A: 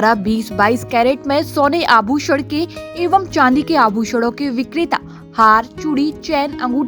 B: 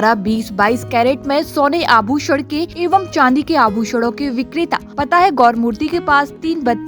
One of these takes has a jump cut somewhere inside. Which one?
B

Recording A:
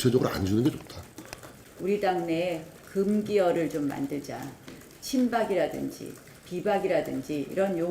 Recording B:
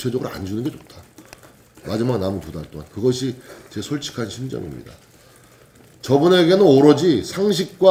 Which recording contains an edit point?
A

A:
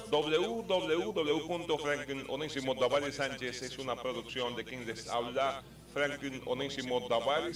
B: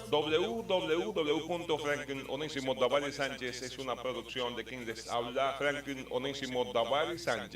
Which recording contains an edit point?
B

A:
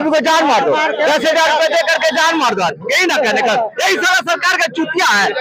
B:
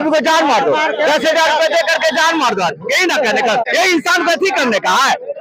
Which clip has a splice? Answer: B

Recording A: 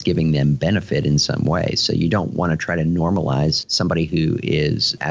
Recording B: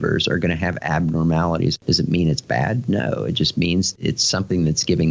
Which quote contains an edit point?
B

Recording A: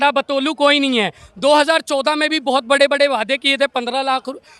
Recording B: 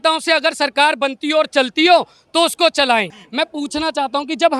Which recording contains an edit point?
B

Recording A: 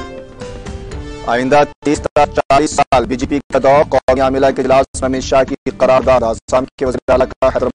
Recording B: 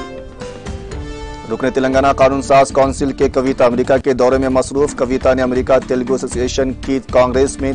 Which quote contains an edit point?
B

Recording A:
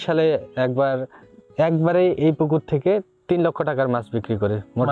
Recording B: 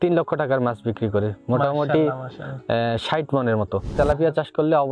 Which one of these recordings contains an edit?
B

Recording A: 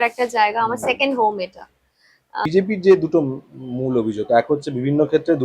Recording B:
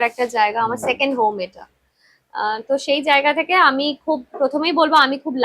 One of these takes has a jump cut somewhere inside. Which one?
A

